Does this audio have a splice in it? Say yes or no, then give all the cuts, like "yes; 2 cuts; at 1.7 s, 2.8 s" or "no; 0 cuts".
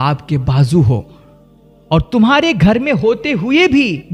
no; 0 cuts